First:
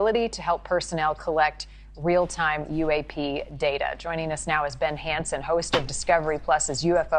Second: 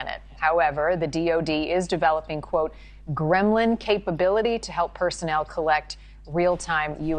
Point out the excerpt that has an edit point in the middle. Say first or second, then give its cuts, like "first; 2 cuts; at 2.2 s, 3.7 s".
first; 1 cut; at 4.6 s